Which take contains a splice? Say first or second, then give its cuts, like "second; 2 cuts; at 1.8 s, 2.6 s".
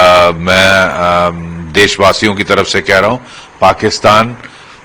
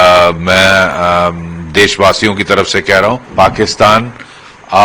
second; 1 cut; at 3.2 s